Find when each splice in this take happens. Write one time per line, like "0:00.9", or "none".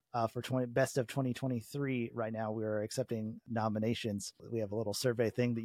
0:03.4
0:04.4